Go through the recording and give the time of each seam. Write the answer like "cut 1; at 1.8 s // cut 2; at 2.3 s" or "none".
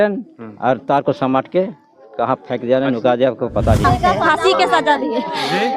cut 1; at 3.8 s